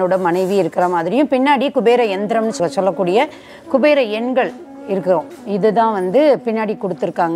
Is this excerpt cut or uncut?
uncut